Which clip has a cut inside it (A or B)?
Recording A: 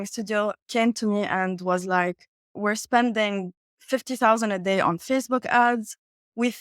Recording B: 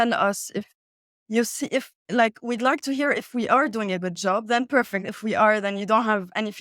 A